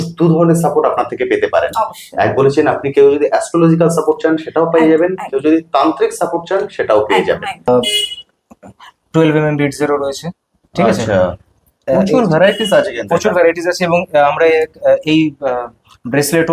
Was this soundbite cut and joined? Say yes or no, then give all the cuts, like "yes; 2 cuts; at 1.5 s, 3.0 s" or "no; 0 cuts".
yes; 1 cut; at 7.7 s